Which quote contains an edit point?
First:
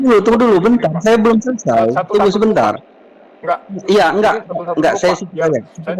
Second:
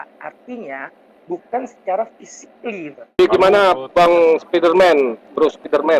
second; 1 cut; at 3.2 s

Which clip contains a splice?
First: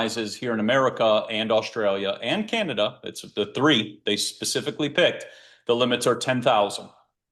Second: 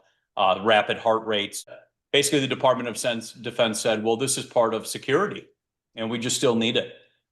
second; 1 cut; at 1.8 s

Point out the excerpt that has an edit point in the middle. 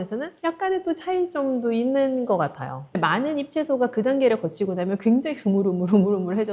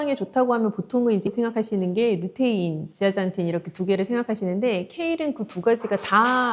first; 1 cut; at 3.0 s

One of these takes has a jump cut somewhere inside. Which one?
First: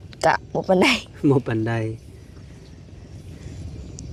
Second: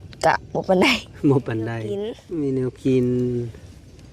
second; 1 cut; at 2.2 s

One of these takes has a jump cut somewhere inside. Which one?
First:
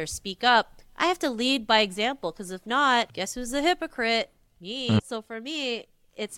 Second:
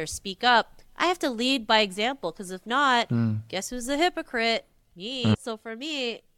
first; 1 cut; at 3.1 s

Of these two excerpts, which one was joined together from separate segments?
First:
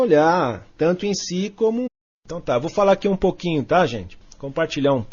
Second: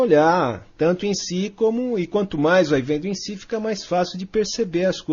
second; 1 cut; at 1.9 s

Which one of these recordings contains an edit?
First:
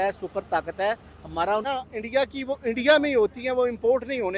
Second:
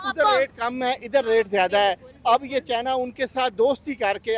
first; 1 cut; at 1.6 s

